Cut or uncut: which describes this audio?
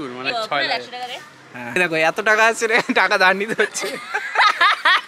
uncut